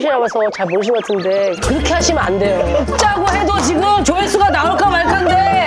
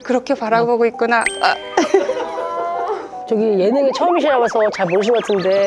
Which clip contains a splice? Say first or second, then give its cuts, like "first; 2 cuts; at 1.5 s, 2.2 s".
second; 2 cuts; at 1.3 s, 3.3 s